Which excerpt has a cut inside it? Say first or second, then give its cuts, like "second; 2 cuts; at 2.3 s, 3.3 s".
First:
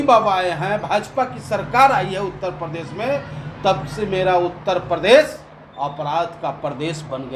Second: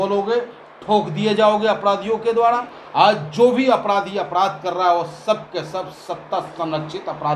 second; 1 cut; at 2.8 s